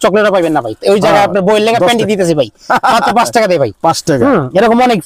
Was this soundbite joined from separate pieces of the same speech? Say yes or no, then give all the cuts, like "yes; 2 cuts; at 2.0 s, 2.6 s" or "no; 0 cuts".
no; 0 cuts